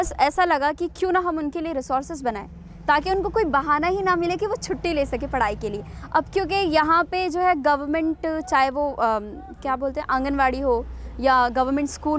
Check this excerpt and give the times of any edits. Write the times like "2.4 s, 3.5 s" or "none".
none